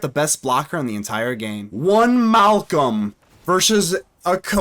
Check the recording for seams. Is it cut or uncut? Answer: cut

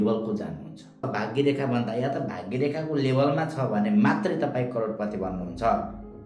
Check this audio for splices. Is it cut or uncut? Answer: cut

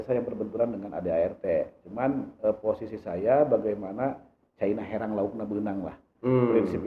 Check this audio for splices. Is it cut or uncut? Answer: uncut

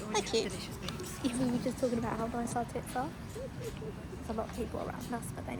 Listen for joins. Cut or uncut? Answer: uncut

